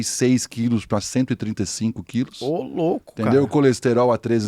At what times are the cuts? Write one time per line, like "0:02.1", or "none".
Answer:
none